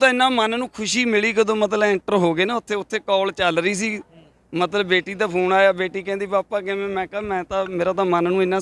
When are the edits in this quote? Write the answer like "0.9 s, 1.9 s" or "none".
none

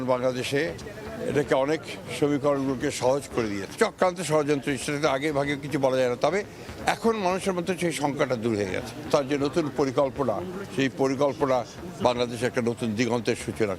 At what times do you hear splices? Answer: 3.7 s, 9.0 s

